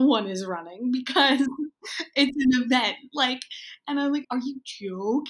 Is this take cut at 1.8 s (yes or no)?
no